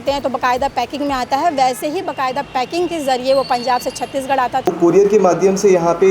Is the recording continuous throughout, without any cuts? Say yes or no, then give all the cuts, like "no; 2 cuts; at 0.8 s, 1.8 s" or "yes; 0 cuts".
no; 1 cut; at 4.7 s